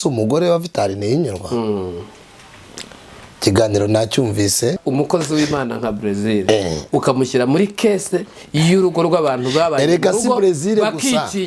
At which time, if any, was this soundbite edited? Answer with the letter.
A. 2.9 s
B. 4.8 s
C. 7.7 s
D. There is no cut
B